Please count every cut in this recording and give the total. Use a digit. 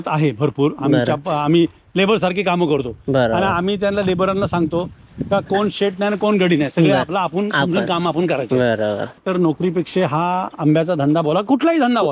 1